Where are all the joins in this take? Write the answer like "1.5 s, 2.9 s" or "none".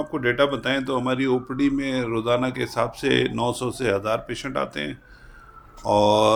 none